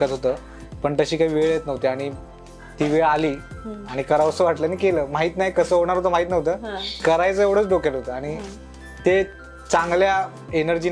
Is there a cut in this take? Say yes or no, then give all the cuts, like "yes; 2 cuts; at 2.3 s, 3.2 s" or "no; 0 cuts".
no; 0 cuts